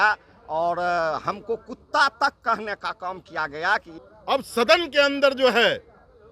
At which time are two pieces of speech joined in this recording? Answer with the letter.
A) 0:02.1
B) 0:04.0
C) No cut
B